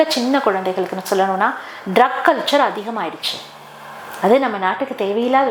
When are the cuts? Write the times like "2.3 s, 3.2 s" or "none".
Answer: none